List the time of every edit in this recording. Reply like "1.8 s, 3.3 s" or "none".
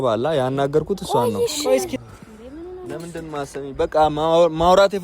1.9 s